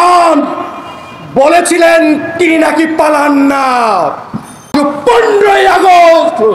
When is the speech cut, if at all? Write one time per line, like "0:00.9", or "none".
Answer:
0:04.7